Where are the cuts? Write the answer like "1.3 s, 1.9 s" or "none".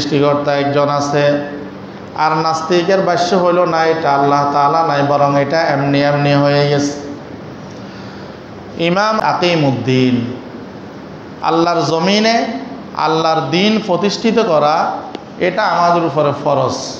9.2 s